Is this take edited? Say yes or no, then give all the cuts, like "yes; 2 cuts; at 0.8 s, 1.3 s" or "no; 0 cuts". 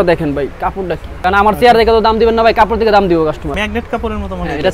yes; 2 cuts; at 1.0 s, 3.5 s